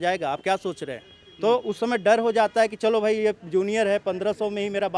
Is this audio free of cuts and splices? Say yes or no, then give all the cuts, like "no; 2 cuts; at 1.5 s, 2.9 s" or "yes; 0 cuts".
yes; 0 cuts